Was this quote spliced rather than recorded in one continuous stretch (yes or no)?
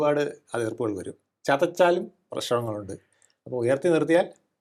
no